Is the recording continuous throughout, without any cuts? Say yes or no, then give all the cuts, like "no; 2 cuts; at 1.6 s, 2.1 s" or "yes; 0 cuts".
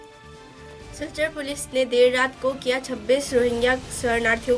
no; 1 cut; at 1.0 s